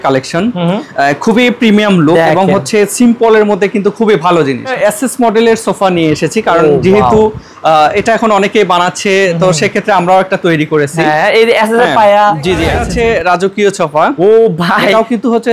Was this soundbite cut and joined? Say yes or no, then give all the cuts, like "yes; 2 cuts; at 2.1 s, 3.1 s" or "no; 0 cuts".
yes; 2 cuts; at 4.7 s, 12.8 s